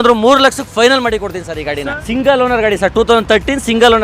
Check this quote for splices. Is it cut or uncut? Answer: cut